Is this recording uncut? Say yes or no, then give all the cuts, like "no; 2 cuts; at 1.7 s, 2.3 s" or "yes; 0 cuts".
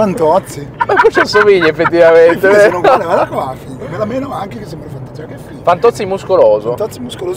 yes; 0 cuts